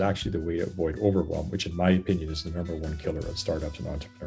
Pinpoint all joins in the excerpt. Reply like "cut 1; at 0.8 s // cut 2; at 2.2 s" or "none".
none